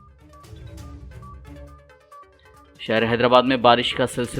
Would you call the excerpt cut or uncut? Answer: uncut